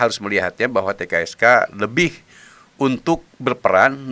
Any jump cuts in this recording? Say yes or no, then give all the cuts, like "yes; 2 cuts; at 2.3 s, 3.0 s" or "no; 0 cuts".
no; 0 cuts